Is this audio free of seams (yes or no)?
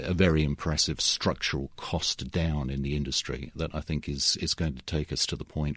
yes